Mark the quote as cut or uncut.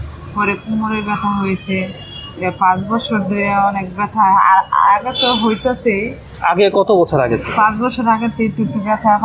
uncut